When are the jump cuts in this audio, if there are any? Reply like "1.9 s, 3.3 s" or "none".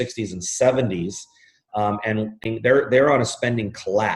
2.4 s